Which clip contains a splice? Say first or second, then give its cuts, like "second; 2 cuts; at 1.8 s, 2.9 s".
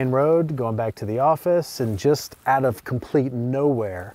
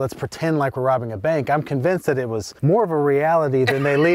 second; 1 cut; at 2.5 s